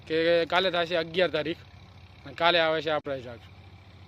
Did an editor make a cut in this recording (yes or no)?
yes